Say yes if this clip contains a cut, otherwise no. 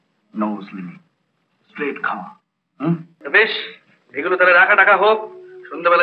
yes